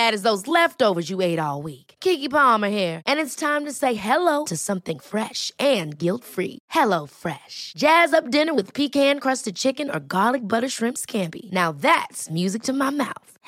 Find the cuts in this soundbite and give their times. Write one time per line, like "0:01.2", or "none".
none

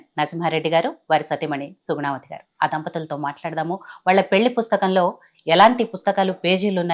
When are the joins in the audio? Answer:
none

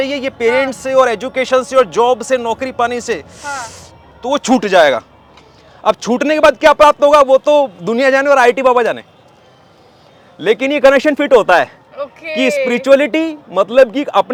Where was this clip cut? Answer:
none

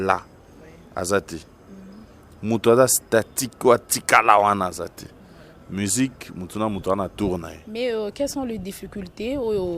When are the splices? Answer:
0:07.6

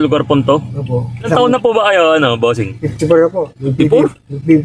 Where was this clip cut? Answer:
none

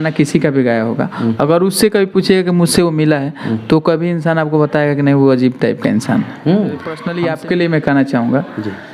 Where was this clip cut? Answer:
0:07.0

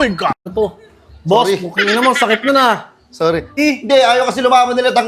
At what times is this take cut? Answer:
0:03.6

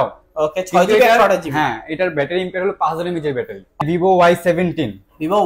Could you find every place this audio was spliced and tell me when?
0:03.8

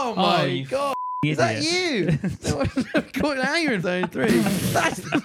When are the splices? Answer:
0:03.8

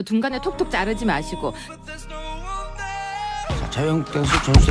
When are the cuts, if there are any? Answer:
0:01.4

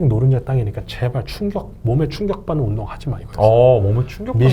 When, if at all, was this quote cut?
none

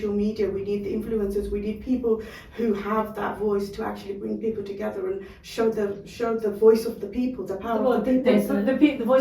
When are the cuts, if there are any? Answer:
none

